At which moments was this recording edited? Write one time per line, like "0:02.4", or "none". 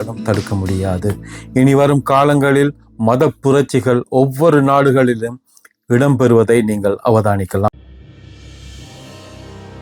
none